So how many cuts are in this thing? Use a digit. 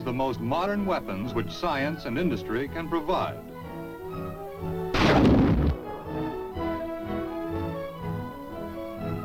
1